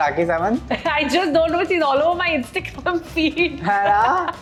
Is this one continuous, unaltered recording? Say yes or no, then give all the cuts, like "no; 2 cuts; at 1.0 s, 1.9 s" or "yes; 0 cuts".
yes; 0 cuts